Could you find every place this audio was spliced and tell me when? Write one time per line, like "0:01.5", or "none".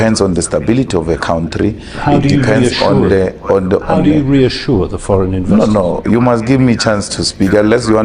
none